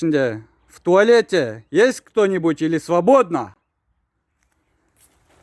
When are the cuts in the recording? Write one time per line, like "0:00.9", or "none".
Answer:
none